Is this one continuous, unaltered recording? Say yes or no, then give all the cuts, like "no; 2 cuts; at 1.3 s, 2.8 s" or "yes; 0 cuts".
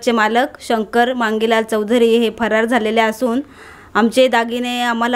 yes; 0 cuts